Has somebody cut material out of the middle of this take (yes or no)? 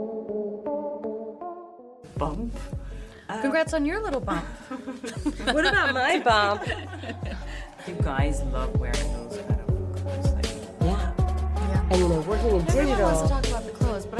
yes